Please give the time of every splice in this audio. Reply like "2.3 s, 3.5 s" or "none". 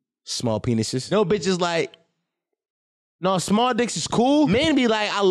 1.0 s, 4.5 s